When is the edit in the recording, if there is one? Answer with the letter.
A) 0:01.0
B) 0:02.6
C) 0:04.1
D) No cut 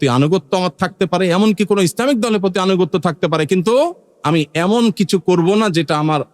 C